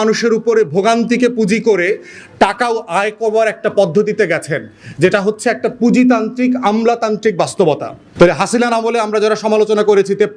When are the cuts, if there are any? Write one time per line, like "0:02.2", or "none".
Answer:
0:08.0